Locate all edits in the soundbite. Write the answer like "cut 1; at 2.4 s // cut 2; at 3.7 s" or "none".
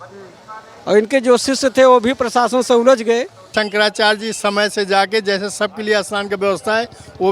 cut 1; at 3.5 s